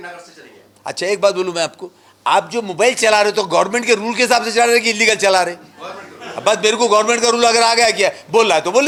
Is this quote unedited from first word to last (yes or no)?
yes